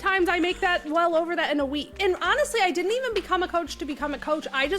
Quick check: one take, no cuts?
no; 1 cut; at 1.9 s

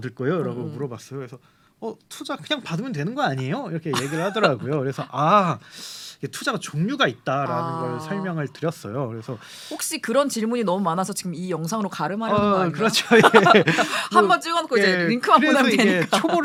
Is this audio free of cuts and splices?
yes; 0 cuts

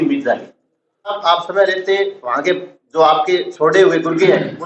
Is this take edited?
yes; 1 cut; at 1.2 s

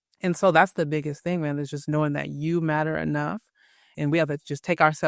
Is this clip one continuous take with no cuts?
no; 1 cut; at 3.9 s

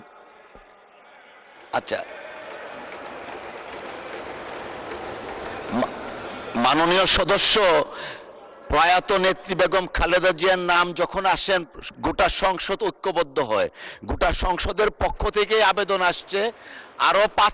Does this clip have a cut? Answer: no; 0 cuts

